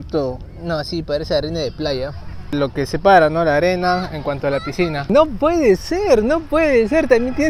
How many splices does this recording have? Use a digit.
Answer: 2